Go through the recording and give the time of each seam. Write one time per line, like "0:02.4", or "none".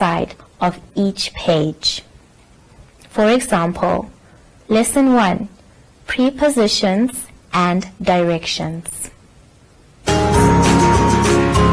0:10.0